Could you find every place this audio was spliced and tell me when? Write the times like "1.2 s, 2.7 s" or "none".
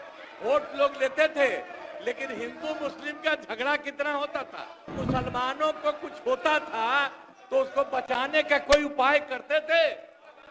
5.0 s